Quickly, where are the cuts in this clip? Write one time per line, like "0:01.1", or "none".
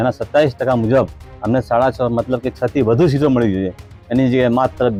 none